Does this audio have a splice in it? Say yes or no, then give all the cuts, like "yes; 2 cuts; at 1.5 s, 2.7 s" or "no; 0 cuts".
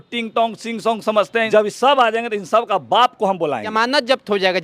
yes; 2 cuts; at 1.5 s, 3.7 s